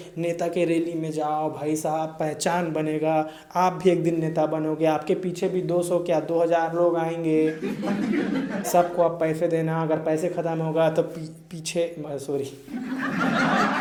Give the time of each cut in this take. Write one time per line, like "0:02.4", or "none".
none